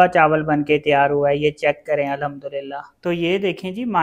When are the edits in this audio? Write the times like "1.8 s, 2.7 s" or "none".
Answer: 2.9 s